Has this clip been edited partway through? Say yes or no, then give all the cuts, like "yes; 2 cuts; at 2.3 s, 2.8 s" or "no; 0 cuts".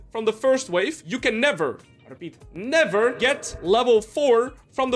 yes; 2 cuts; at 1.0 s, 3.2 s